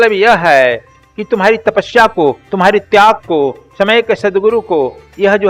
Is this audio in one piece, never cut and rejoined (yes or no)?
yes